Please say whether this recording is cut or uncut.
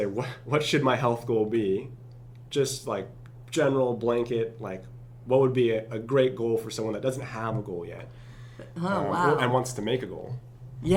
uncut